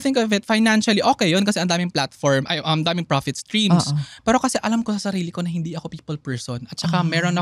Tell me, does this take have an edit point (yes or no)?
no